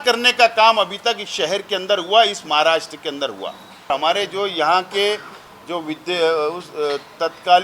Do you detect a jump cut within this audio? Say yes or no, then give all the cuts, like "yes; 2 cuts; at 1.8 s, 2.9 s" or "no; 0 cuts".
yes; 1 cut; at 3.9 s